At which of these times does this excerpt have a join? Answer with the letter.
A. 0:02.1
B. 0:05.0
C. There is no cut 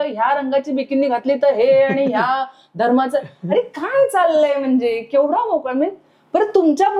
C